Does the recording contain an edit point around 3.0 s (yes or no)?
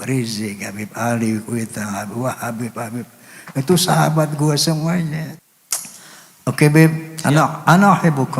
no